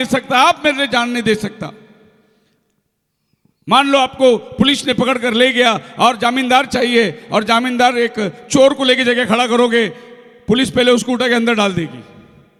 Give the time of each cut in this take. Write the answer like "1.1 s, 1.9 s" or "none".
none